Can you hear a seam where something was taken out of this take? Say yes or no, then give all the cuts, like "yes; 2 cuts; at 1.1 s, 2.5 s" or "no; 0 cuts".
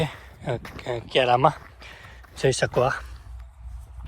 no; 0 cuts